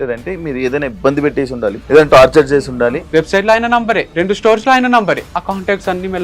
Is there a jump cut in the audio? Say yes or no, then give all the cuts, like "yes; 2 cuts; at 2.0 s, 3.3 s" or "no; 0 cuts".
yes; 4 cuts; at 1.8 s, 3.0 s, 4.1 s, 5.3 s